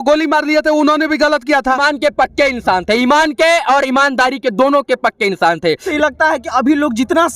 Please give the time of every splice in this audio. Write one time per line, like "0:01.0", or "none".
0:01.8
0:05.9